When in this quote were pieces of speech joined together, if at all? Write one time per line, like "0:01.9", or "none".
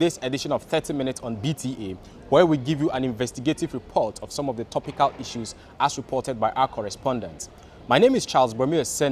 0:02.4